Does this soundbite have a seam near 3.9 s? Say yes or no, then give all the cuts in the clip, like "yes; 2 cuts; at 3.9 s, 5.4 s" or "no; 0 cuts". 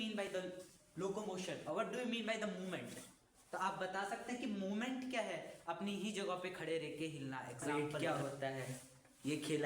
no; 1 cut; at 7.6 s